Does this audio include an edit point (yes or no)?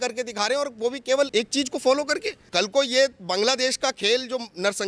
yes